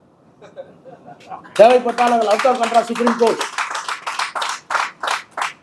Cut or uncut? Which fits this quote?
uncut